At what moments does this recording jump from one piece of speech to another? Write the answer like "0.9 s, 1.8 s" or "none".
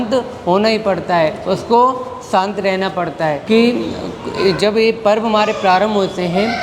3.4 s